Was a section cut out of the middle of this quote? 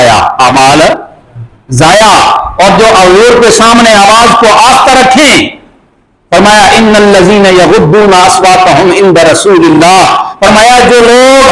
no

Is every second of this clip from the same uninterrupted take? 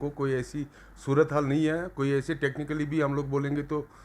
yes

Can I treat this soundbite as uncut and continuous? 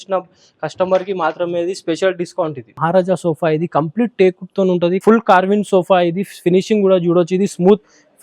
no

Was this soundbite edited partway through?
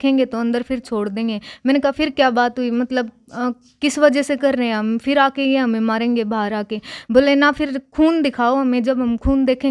no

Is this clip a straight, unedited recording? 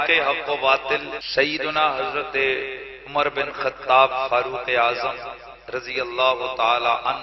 no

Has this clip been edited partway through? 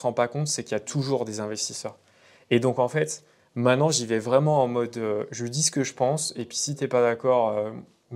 no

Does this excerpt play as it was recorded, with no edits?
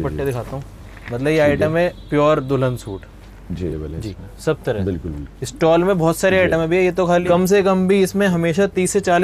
no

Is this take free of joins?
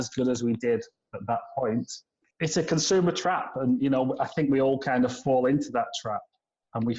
yes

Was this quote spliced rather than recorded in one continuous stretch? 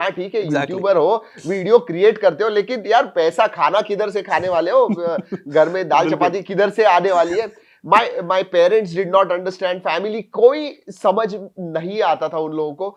no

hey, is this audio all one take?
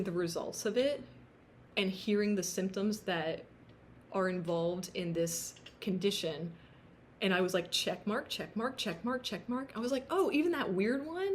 yes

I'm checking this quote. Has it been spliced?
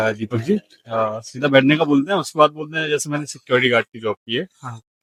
no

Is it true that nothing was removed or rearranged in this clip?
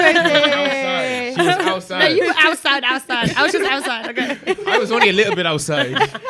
yes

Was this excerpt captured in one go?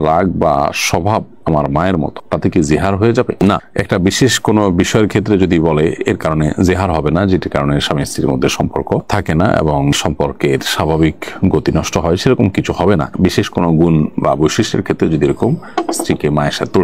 yes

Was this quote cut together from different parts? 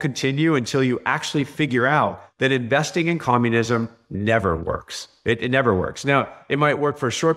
no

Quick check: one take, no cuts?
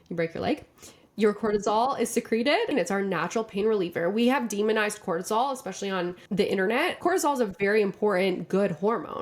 no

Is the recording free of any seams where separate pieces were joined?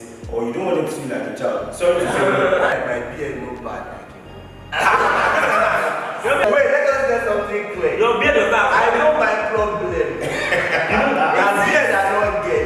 no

